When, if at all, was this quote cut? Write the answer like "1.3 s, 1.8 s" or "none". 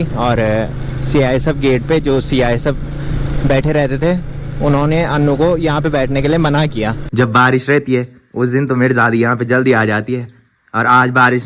7.0 s

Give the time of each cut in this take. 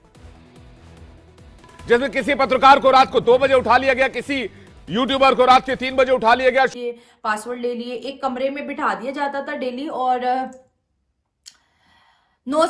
6.7 s

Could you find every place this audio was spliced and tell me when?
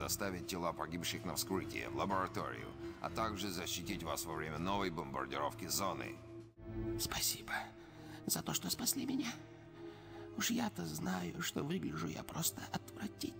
6.6 s

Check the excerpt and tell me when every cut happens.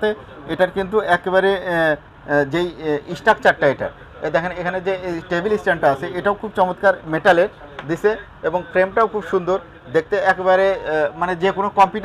none

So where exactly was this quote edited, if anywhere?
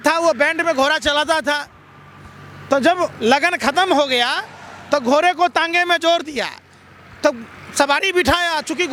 none

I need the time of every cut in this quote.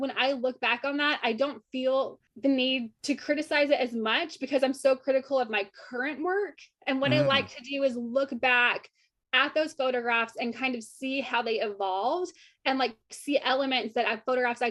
2.2 s, 2.9 s

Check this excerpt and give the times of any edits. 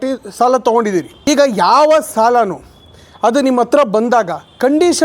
1.1 s

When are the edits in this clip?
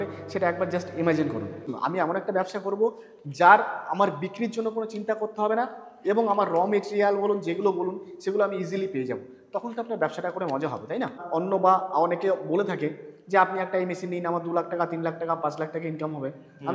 1.7 s, 11.2 s

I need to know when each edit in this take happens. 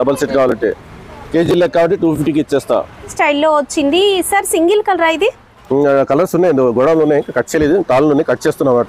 3.1 s

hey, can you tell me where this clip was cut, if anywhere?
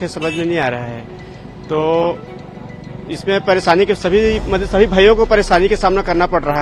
none

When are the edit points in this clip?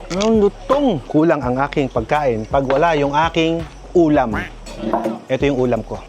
1.0 s

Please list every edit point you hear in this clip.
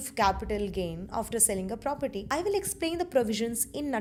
none

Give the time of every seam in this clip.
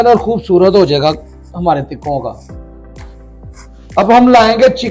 none

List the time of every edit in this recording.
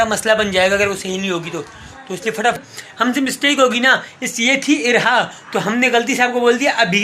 2.6 s

